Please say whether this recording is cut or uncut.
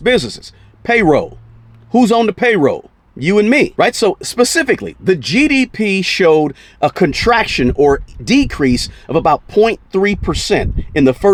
uncut